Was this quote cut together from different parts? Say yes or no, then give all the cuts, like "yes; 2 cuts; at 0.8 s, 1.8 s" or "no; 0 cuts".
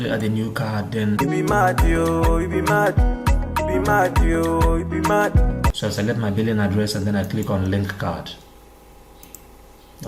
yes; 1 cut; at 5.7 s